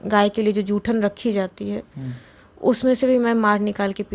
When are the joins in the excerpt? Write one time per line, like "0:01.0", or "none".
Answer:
none

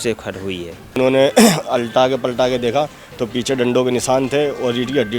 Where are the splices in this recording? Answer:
0:01.0

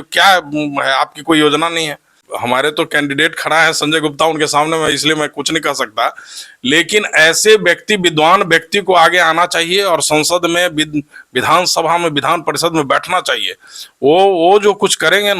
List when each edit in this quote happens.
0:02.2

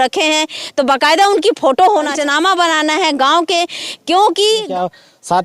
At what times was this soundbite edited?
0:02.2
0:04.7

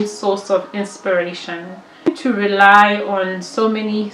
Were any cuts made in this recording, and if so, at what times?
0:02.1

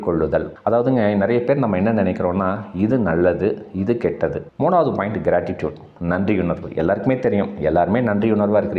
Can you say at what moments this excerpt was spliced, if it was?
0:04.4

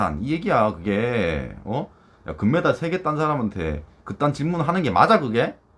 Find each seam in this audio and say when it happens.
none

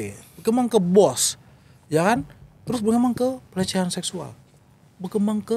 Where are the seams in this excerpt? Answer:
none

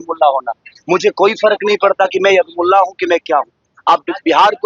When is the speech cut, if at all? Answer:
none

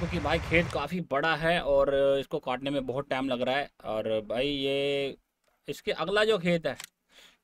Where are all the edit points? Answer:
none

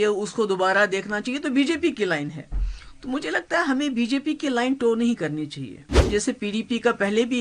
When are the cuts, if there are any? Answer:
0:06.1

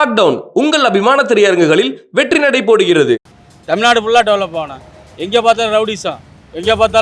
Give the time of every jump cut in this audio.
0:03.3

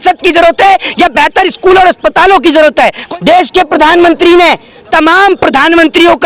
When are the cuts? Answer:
0:03.0

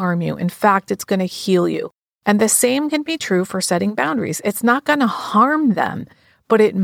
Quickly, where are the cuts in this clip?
none

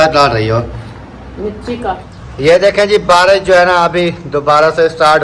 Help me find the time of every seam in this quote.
0:02.2

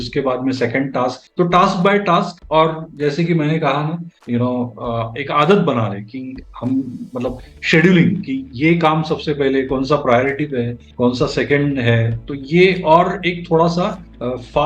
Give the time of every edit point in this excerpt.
0:04.1

